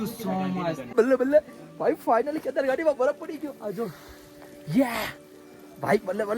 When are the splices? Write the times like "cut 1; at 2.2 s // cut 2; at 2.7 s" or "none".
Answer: cut 1; at 0.9 s